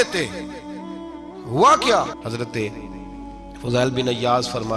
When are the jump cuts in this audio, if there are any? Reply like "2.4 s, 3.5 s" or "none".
2.2 s